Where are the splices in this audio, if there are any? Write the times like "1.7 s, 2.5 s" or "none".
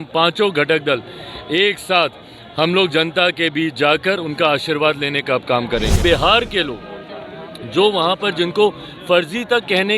6.0 s